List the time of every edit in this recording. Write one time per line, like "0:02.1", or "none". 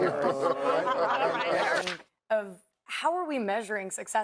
0:01.8